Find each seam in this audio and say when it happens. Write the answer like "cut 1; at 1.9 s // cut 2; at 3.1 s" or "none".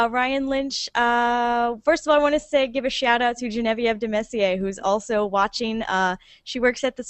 cut 1; at 4.9 s